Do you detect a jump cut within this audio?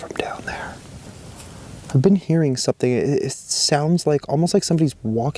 no; 0 cuts

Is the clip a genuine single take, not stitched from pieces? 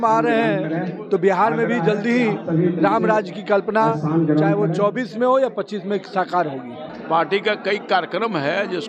no; 1 cut; at 6.9 s

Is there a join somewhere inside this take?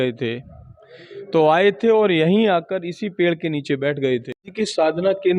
yes; 1 cut; at 4.4 s

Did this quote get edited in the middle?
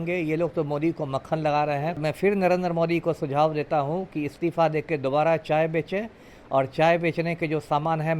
yes; 1 cut; at 2.0 s

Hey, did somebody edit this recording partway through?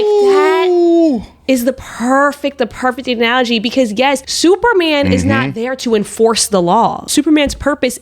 yes; 2 cuts; at 4.3 s, 7.0 s

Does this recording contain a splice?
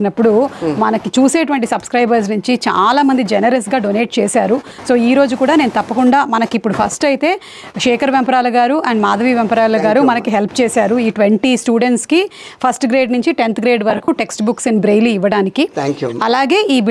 no; 0 cuts

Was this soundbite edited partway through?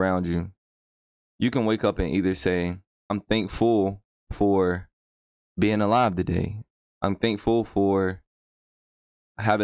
yes; 1 cut; at 3.2 s

